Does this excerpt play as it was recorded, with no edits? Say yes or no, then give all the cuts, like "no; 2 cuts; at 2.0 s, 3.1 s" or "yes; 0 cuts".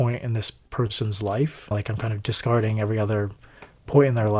no; 1 cut; at 1.7 s